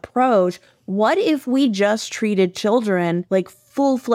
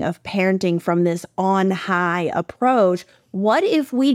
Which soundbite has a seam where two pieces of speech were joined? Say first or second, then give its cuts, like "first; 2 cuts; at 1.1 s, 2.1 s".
first; 1 cut; at 3.2 s